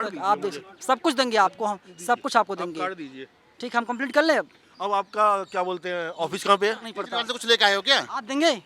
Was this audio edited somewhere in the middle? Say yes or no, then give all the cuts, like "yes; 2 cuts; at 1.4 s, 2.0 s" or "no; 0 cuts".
yes; 1 cut; at 7.0 s